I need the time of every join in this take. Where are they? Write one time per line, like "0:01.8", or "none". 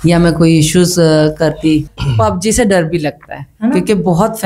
0:01.9